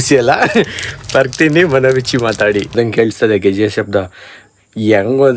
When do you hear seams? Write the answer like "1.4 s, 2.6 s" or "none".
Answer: 2.7 s